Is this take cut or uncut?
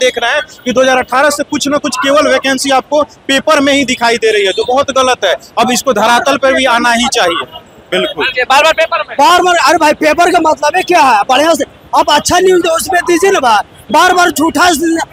uncut